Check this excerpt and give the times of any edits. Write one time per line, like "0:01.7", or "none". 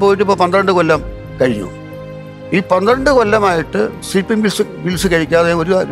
0:01.8